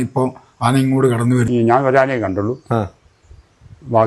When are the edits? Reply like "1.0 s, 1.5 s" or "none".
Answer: 1.5 s

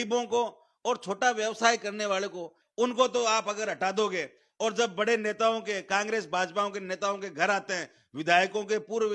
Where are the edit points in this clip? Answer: 2.6 s

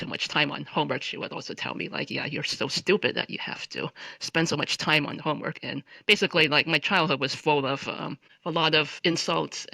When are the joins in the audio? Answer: none

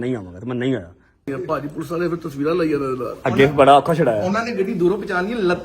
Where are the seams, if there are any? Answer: 1.3 s

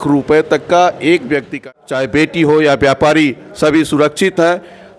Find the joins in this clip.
1.6 s

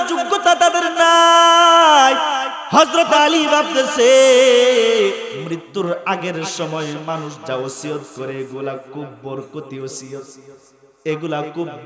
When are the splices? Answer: 2.5 s, 5.3 s

